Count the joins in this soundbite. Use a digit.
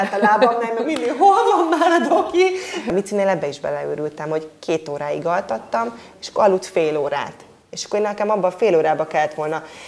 1